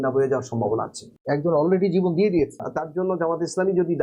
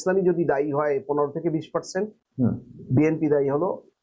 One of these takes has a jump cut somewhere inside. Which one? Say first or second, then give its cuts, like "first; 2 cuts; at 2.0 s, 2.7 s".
first; 2 cuts; at 1.1 s, 2.6 s